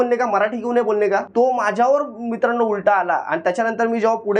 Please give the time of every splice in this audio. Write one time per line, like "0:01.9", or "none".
0:01.3